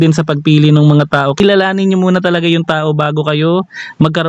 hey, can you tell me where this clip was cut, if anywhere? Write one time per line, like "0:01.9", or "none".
0:01.4